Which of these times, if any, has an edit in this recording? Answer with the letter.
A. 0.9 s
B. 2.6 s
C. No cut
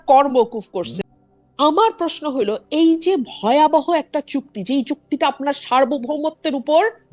A